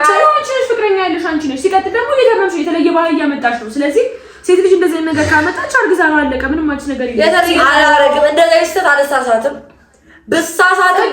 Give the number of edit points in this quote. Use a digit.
1